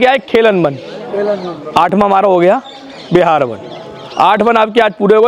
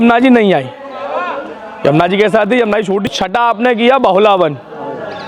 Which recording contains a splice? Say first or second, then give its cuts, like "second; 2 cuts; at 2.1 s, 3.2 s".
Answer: second; 1 cut; at 3.1 s